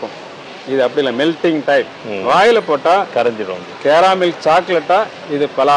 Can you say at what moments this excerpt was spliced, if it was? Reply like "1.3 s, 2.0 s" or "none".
none

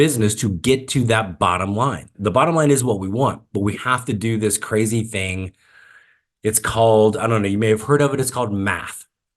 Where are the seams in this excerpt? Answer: 2.1 s

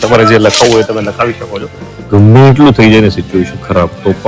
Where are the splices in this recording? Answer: 2.0 s

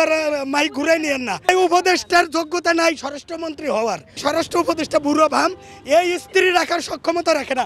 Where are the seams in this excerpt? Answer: 1.5 s, 4.2 s

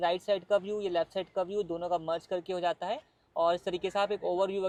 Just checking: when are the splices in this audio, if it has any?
none

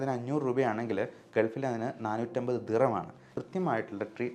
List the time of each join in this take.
3.2 s

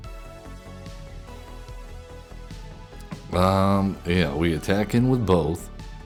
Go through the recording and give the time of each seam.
none

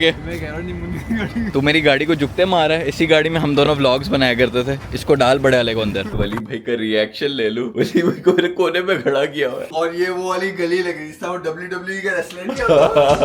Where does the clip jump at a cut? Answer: 1.5 s, 6.1 s

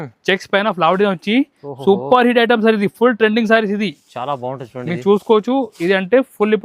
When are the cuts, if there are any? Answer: none

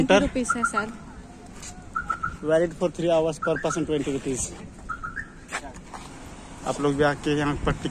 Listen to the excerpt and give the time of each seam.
6.1 s

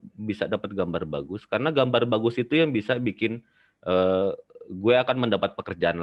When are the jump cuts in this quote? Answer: none

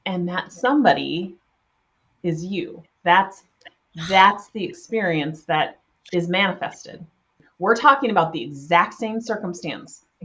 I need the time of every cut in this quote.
7.5 s

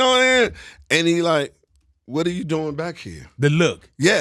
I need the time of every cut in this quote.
none

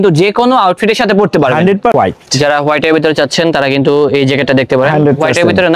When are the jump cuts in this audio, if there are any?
1.9 s

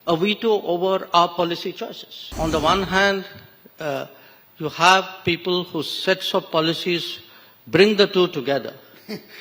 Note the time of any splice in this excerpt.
2.3 s

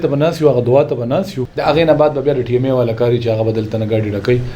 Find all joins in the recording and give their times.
1.4 s

